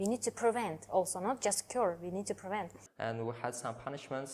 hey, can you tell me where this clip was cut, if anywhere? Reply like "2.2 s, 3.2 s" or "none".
2.8 s

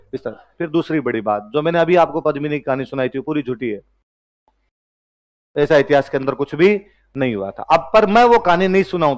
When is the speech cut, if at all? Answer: none

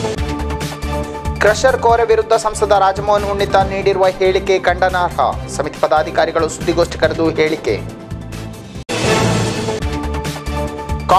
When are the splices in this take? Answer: 1.1 s

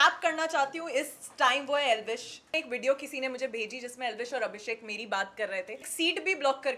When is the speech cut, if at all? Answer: 2.5 s, 5.9 s

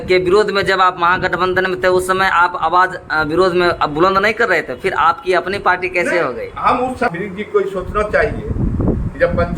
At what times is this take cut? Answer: 7.1 s

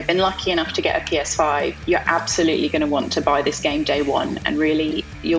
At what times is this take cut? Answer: 1.8 s

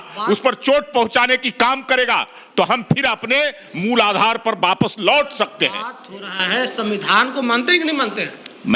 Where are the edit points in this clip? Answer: none

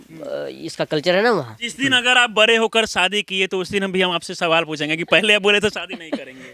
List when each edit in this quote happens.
1.6 s

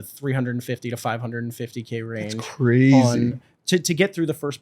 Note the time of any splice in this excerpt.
none

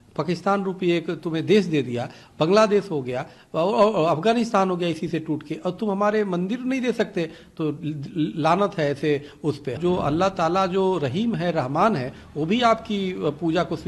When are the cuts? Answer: 9.8 s

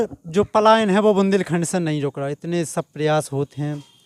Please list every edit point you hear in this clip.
none

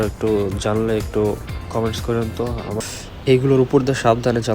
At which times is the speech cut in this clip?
2.8 s

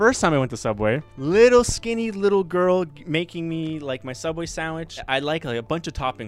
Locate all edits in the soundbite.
1.1 s, 5.0 s

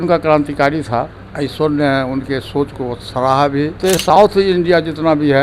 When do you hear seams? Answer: 3.8 s

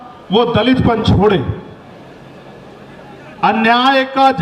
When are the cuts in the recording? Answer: none

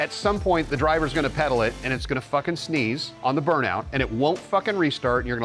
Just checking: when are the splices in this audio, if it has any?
3.1 s

